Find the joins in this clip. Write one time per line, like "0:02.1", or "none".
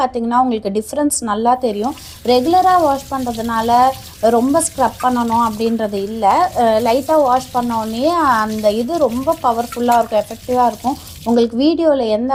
none

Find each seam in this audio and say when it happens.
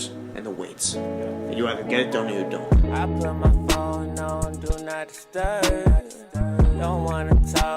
0:02.6

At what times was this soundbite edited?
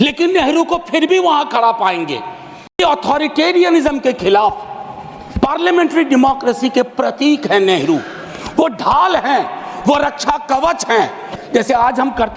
0:02.8
0:11.4

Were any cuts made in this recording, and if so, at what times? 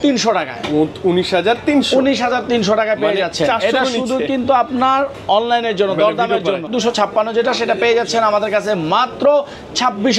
0:06.7

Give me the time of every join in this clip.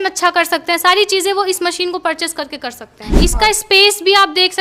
0:03.0

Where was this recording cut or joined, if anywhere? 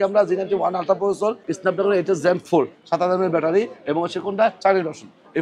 0:01.5

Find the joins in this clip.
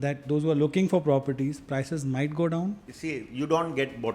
0:02.9

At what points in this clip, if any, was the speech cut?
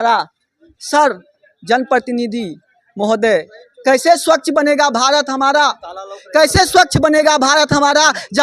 none

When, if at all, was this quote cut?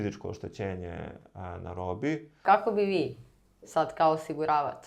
0:02.4

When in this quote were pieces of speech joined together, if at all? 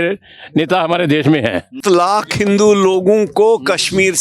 0:01.7

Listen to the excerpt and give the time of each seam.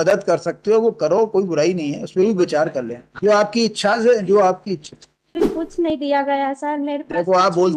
0:05.6

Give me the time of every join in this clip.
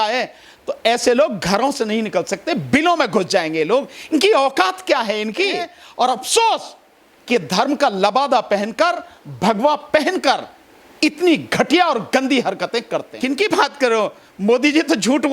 0:05.8
0:13.1

